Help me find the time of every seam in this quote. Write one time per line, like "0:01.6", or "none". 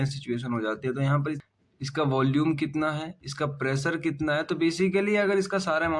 0:01.4